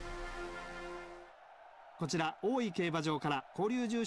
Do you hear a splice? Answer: yes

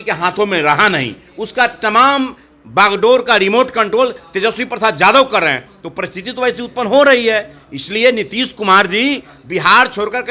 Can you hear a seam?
no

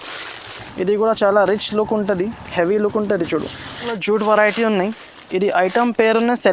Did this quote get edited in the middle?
yes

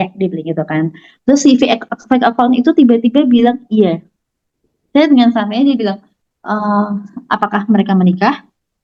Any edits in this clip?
no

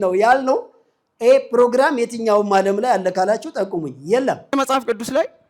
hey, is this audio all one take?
no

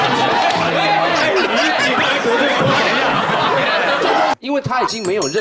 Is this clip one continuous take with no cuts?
no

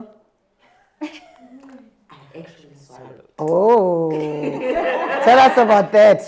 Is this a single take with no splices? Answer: yes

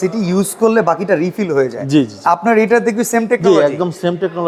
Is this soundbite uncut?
yes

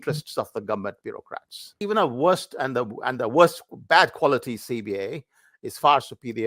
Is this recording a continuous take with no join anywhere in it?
no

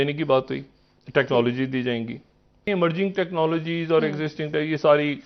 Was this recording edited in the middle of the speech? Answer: yes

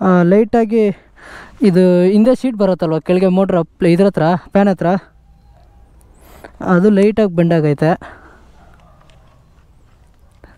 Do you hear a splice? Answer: no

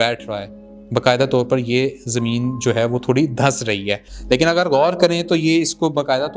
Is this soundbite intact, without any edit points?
no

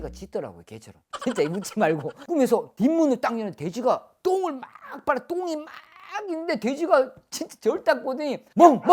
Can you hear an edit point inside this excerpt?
no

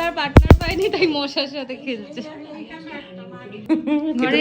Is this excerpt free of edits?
no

